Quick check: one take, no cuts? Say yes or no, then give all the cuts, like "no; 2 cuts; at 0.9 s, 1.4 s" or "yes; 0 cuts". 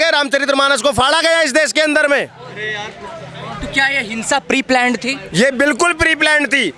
yes; 0 cuts